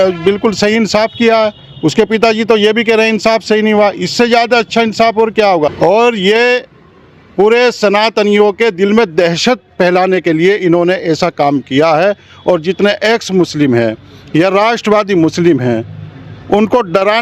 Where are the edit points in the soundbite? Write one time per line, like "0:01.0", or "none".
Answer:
0:05.7